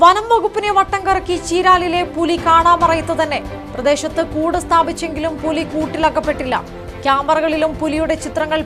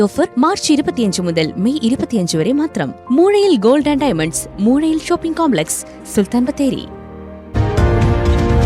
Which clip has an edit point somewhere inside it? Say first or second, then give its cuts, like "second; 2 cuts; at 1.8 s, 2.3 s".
second; 1 cut; at 7.3 s